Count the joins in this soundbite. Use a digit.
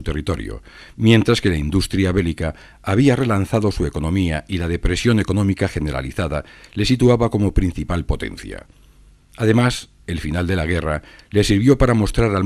1